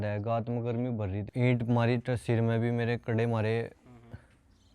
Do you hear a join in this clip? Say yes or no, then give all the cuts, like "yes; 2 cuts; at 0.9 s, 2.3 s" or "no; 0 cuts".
yes; 1 cut; at 1.2 s